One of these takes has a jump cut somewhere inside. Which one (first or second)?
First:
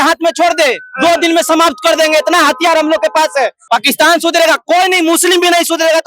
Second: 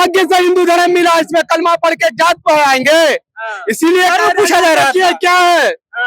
first